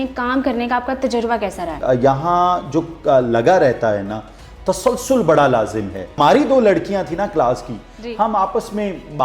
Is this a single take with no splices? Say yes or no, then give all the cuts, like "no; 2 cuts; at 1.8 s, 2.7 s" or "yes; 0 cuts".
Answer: no; 2 cuts; at 1.8 s, 6.2 s